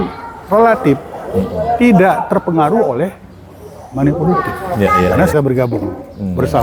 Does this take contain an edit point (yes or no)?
yes